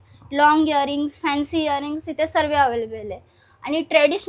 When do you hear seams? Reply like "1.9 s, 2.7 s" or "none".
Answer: none